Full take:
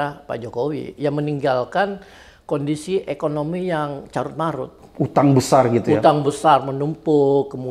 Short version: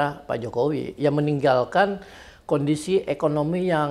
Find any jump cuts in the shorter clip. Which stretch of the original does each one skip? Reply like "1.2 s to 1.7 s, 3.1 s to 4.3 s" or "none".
none